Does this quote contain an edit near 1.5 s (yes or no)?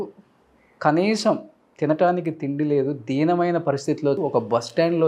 no